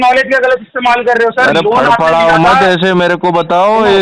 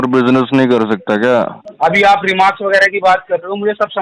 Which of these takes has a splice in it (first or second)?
second